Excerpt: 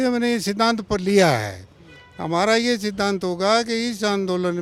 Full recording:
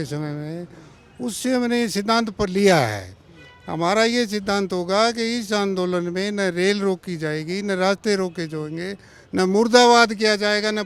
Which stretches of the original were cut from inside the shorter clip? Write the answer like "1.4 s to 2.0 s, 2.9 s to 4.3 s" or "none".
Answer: none

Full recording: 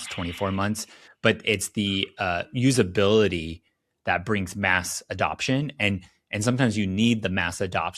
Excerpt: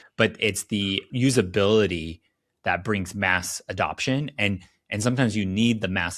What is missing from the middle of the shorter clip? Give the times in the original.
2.1 s to 2.5 s

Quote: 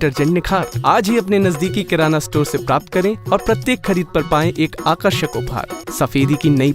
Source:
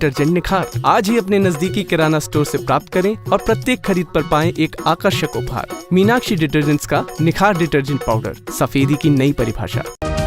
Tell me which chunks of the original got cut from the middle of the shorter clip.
5.8 s to 8.4 s

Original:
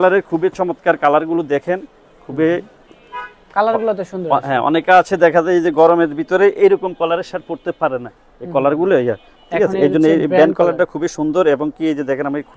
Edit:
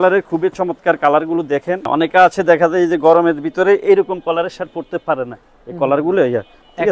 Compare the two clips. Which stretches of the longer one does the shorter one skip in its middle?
1.9 s to 4.6 s

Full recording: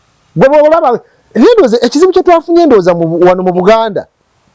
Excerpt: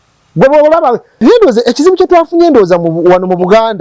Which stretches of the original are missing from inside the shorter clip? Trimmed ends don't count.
1.1 s to 1.2 s

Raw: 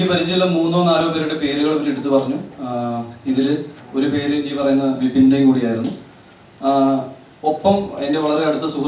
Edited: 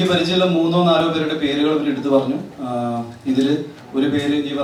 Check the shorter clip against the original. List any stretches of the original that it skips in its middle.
none

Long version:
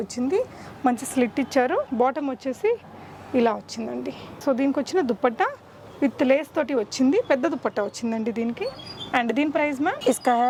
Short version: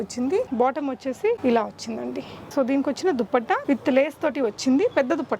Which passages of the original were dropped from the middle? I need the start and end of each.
0.8 s to 2.7 s, 5.5 s to 5.9 s

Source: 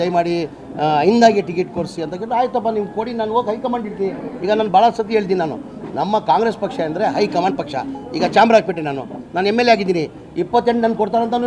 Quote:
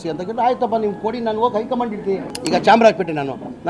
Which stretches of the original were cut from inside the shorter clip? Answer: 4.3 s to 8.0 s

